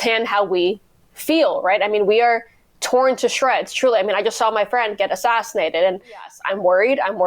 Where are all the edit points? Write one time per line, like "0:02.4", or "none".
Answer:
0:06.3